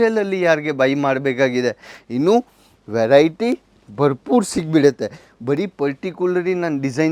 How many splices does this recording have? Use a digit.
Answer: 0